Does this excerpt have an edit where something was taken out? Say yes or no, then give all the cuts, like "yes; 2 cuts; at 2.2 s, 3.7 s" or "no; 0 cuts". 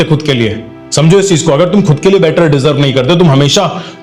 no; 0 cuts